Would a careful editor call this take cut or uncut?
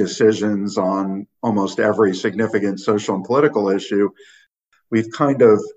cut